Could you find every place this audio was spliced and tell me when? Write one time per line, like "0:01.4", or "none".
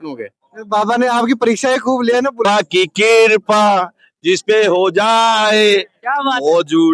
0:02.4